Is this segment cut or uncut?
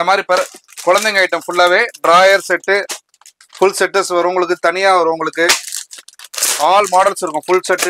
uncut